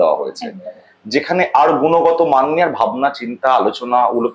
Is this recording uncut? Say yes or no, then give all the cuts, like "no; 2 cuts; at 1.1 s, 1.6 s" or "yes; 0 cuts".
yes; 0 cuts